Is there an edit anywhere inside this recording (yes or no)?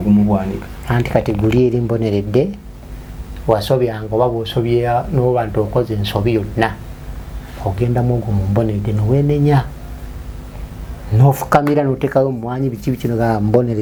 no